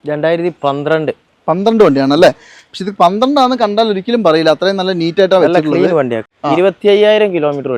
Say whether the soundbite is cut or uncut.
cut